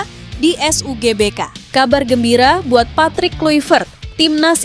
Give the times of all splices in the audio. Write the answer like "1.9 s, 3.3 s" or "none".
1.5 s